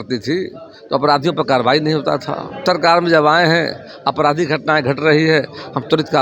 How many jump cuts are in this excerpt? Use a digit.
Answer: 1